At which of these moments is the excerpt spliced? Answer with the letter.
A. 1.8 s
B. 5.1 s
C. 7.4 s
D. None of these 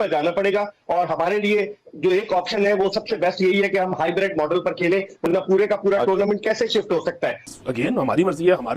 C